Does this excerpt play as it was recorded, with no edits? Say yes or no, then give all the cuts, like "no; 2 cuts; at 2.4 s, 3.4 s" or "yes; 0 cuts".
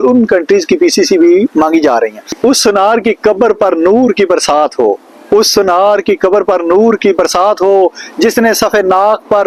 yes; 0 cuts